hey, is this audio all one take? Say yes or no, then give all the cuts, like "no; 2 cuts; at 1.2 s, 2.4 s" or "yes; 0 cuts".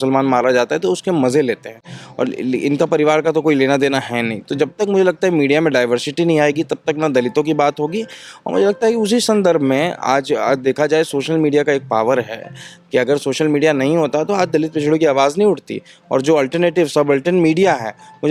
yes; 0 cuts